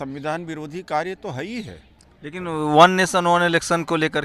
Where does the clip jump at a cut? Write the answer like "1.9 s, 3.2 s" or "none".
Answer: none